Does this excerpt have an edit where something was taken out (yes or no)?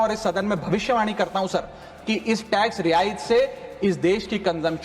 no